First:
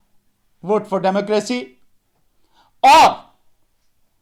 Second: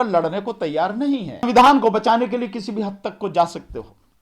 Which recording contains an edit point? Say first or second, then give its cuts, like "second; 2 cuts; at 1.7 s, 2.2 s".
second; 1 cut; at 1.5 s